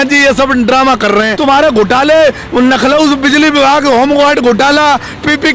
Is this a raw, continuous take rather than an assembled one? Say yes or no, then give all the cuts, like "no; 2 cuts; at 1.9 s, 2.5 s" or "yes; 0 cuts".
no; 1 cut; at 1.3 s